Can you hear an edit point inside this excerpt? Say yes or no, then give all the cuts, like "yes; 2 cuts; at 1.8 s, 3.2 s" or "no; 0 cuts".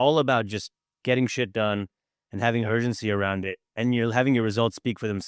no; 0 cuts